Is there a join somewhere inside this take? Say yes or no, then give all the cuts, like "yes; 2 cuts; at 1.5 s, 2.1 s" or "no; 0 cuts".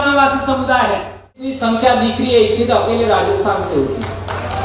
yes; 1 cut; at 1.6 s